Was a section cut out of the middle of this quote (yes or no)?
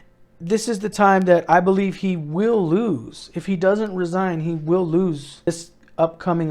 yes